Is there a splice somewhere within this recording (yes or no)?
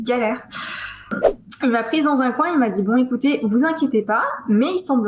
yes